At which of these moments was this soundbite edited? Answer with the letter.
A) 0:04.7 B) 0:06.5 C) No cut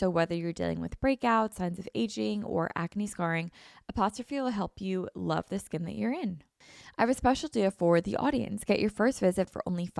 B